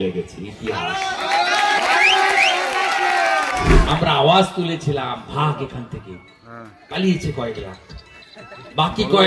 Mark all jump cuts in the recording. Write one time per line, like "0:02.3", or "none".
0:03.8